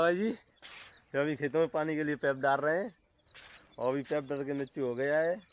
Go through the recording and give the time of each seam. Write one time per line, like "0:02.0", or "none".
none

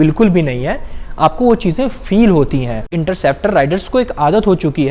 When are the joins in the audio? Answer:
0:02.9

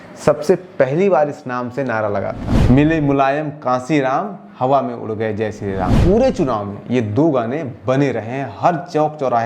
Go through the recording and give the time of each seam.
0:02.5
0:05.9

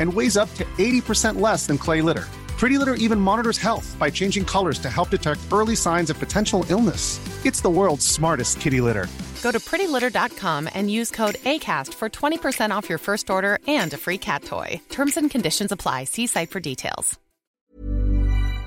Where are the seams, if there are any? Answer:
0:17.5

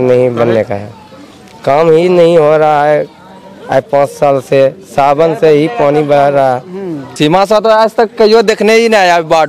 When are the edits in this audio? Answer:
0:07.1

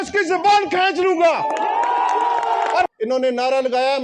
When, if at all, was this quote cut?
0:02.9

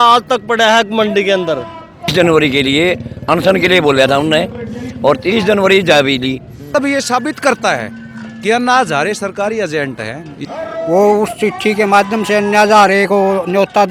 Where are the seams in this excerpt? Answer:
0:02.1
0:06.7
0:10.4

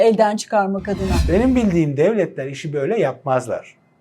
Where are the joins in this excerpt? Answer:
0:01.1

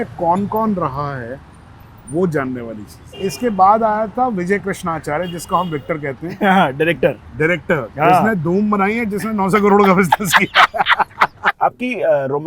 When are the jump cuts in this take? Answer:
0:03.1
0:11.4

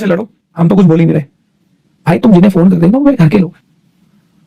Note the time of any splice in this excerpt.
none

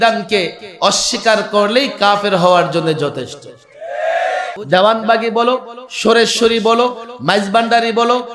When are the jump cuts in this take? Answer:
0:04.6

